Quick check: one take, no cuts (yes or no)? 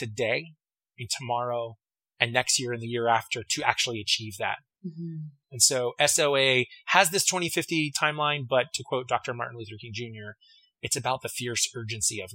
yes